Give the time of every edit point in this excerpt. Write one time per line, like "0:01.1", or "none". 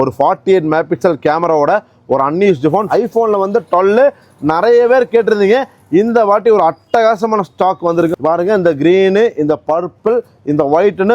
0:02.9
0:08.1